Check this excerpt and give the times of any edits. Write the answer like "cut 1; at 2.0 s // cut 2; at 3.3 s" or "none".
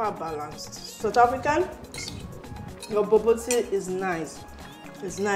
cut 1; at 1.0 s